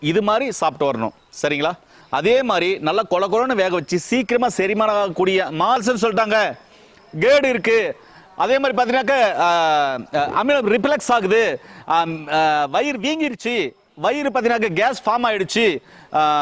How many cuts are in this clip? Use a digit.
1